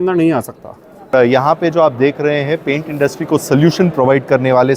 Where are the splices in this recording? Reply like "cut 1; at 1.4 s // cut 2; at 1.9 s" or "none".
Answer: cut 1; at 1.1 s